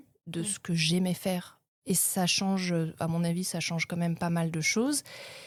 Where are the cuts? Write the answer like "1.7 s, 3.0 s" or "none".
none